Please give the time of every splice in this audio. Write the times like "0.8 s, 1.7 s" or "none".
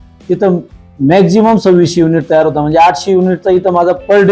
none